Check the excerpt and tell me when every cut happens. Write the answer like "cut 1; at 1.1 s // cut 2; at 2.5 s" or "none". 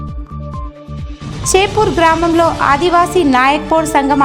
cut 1; at 1.3 s